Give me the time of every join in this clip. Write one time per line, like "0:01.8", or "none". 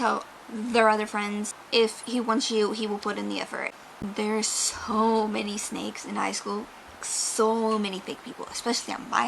0:01.5
0:03.7